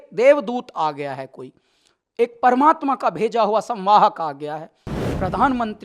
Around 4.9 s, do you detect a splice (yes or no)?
yes